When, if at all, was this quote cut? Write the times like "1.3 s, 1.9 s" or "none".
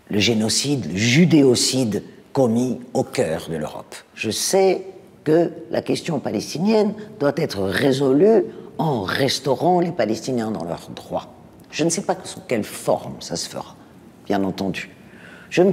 4.1 s